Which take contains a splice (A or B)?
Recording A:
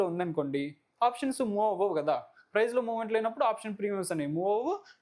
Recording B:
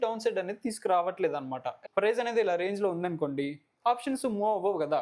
B